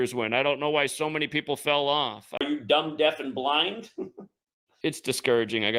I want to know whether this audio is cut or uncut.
uncut